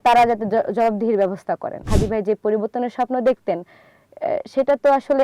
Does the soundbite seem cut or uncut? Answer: cut